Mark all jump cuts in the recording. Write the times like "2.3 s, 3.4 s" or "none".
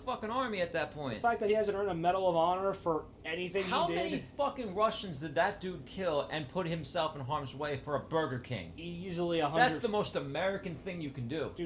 none